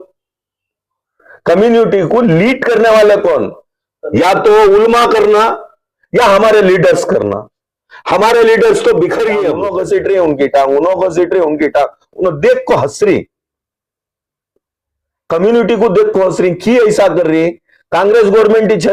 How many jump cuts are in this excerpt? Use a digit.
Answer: 1